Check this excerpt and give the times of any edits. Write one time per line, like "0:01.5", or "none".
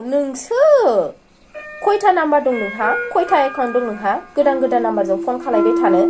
none